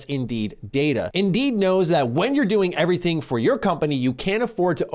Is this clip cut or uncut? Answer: cut